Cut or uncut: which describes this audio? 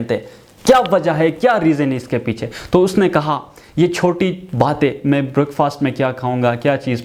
uncut